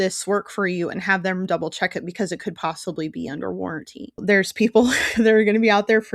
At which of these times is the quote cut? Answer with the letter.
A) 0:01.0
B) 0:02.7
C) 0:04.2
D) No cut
C